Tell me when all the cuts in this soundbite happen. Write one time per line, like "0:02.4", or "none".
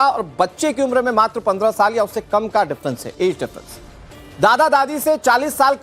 0:04.7